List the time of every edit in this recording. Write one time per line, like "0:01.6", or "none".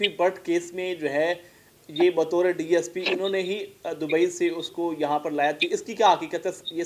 none